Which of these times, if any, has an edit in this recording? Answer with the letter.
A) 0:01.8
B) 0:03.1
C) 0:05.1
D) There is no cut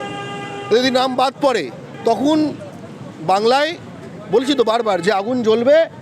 A